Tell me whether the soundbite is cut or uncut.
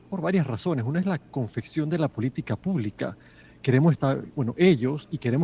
uncut